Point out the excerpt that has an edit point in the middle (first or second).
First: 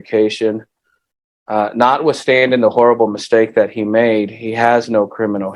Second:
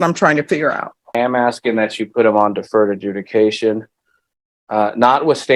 second